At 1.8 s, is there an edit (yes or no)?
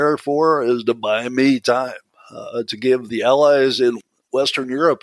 no